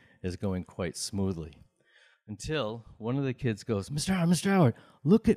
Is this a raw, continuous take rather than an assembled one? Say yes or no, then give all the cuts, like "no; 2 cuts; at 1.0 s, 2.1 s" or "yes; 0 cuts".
yes; 0 cuts